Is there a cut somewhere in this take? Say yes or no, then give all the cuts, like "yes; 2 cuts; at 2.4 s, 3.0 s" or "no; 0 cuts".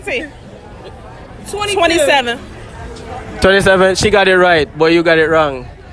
no; 0 cuts